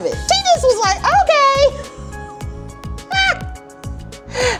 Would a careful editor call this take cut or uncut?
uncut